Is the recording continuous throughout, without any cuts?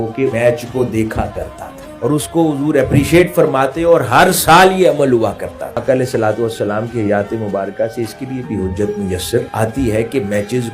no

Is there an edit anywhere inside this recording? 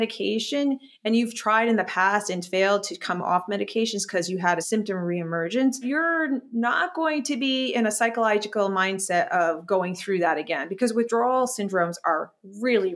yes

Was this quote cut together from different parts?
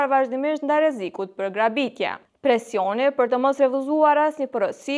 yes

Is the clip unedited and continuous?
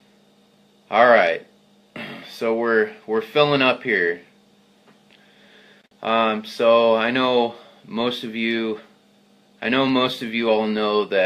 no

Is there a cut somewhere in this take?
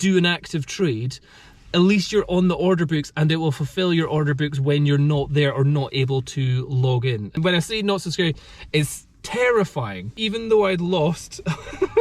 yes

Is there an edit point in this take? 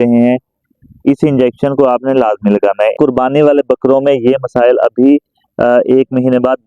yes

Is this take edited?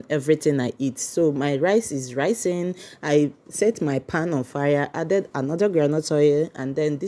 no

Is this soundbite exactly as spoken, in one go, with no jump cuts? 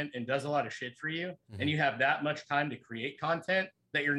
yes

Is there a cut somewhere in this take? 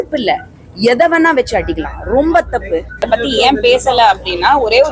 yes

